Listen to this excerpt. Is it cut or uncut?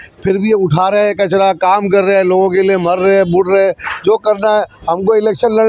uncut